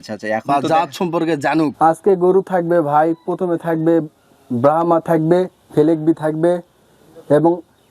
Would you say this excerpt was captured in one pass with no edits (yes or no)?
no